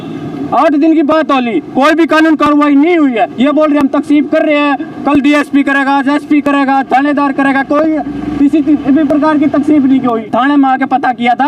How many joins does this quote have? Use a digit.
1